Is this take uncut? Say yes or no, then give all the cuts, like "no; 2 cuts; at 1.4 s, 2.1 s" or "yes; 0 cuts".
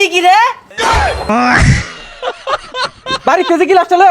no; 2 cuts; at 1.0 s, 3.1 s